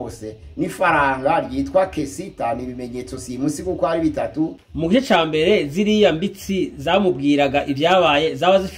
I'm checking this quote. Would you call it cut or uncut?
cut